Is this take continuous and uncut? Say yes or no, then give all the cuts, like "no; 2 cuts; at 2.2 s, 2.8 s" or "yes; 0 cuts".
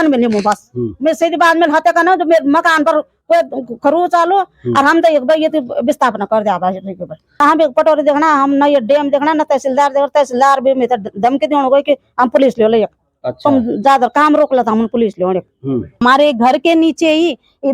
no; 2 cuts; at 7.4 s, 16.0 s